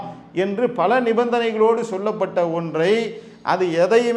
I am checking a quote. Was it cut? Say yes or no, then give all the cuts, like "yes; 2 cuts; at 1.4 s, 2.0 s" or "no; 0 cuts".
no; 0 cuts